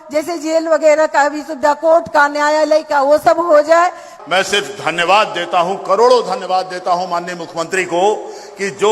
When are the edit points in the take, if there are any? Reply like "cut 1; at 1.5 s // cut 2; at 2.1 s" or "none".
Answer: cut 1; at 4.1 s